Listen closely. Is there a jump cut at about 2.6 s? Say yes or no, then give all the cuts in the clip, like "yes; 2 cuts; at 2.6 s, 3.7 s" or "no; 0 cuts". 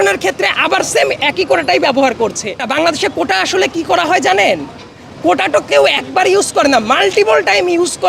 yes; 1 cut; at 2.6 s